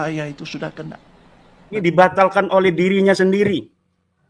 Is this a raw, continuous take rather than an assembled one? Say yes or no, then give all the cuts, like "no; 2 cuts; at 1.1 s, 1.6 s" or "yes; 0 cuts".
no; 1 cut; at 1.8 s